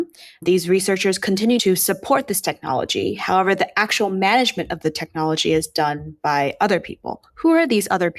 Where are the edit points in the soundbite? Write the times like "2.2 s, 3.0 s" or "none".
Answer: 1.6 s

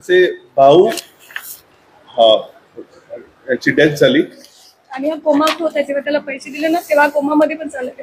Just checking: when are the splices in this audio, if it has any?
1.2 s

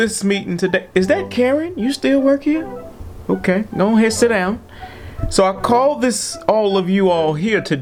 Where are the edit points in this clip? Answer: none

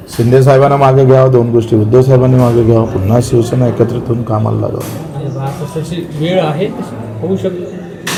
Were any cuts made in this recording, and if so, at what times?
none

